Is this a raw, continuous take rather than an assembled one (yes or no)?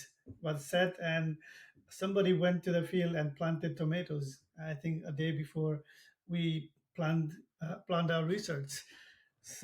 yes